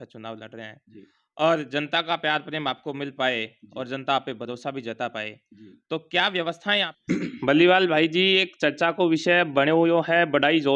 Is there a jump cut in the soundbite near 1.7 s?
no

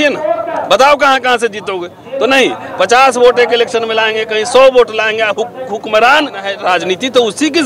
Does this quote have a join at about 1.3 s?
no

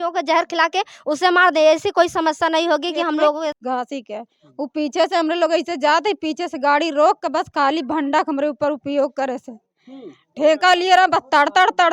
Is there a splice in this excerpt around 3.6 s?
yes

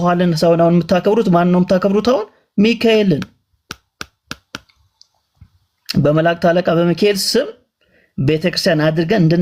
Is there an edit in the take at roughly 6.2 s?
no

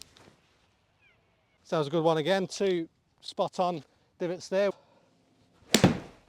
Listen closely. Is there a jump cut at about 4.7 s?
yes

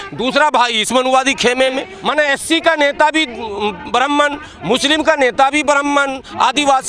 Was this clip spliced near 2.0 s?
yes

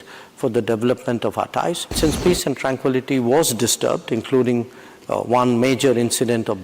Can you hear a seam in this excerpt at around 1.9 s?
yes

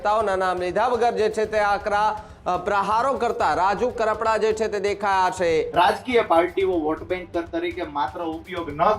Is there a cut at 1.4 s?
no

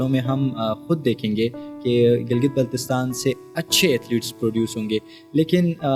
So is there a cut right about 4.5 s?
no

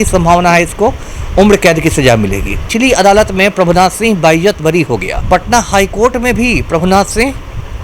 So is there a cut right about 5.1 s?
yes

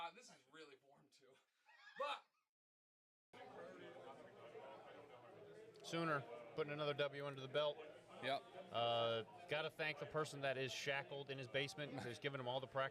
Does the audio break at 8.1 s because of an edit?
no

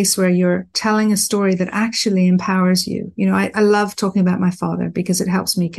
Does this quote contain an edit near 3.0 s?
no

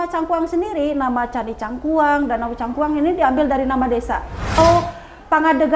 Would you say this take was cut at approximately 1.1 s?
no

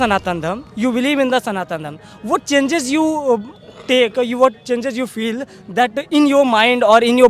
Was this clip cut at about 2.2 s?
no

